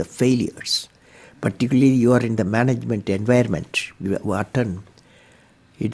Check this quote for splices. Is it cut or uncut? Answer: uncut